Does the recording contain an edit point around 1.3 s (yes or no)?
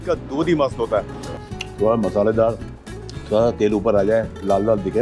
yes